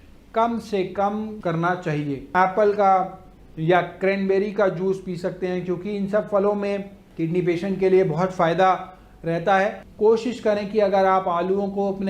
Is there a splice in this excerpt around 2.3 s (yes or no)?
yes